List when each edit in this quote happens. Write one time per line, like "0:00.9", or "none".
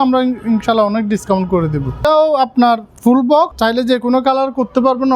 0:02.0
0:03.5

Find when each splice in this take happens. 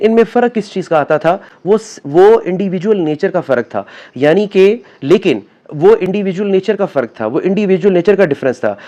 none

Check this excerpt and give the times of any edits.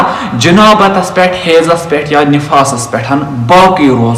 none

